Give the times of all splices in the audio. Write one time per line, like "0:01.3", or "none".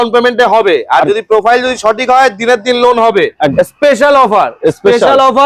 0:03.5